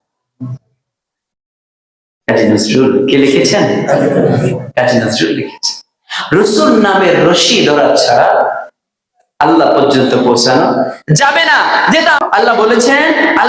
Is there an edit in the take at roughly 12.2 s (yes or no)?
yes